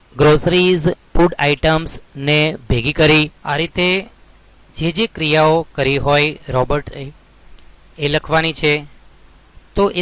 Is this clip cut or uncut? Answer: cut